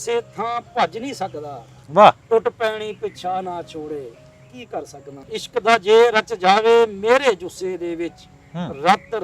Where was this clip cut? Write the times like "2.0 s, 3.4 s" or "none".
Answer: 1.8 s, 5.2 s

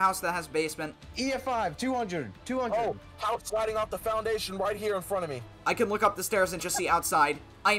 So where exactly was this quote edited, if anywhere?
1.0 s

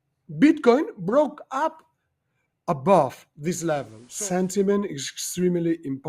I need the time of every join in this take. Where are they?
4.0 s

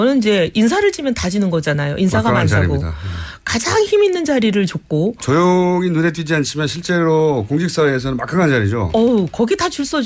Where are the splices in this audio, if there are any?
2.1 s

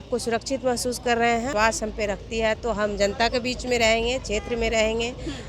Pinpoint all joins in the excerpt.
1.5 s

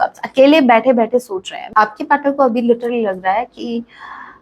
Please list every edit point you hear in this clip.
1.6 s

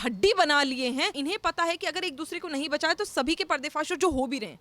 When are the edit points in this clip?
1.1 s

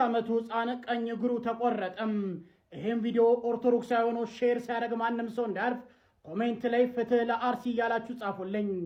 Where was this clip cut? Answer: none

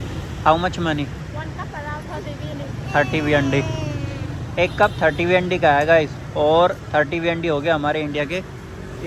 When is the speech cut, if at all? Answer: none

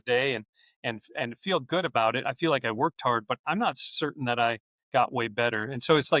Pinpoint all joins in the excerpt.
4.7 s

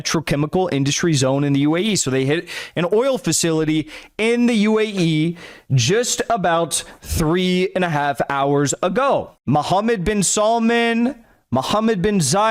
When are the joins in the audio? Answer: 9.3 s

